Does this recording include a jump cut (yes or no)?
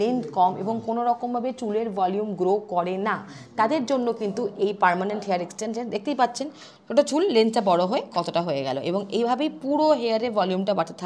no